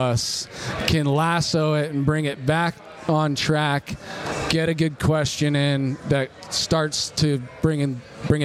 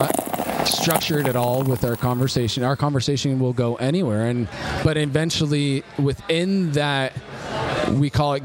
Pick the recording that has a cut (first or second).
second